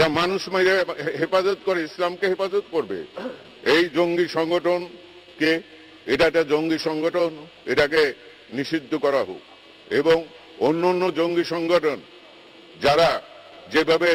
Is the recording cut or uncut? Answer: uncut